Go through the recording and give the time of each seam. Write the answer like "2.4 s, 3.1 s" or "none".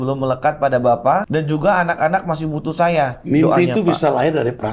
1.3 s, 3.2 s